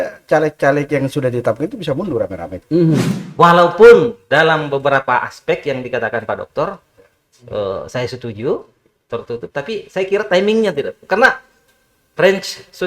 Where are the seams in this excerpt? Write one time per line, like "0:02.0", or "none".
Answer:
0:03.2